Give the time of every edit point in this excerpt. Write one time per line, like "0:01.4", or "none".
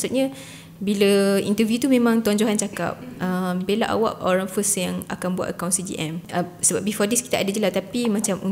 0:06.3